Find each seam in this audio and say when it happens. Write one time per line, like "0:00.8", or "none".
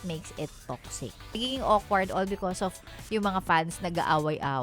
0:01.4

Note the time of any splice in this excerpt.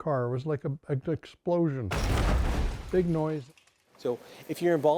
0:03.5

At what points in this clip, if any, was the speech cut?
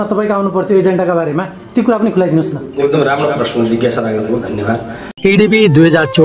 0:05.1

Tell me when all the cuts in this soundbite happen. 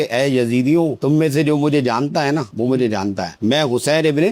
0:03.3

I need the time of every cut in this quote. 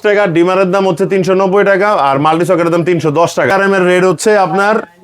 0:03.5

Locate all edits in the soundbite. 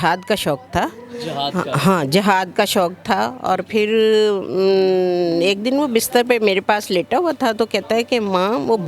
none

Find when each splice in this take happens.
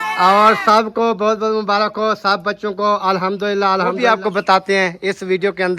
0:04.0

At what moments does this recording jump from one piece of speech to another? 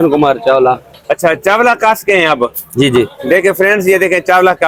none

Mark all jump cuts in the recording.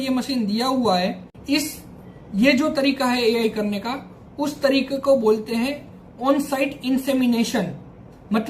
0:01.3

